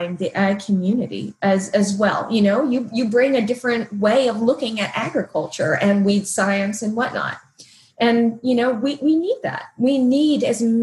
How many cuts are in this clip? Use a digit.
0